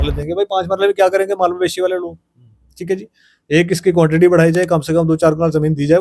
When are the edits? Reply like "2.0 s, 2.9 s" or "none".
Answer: none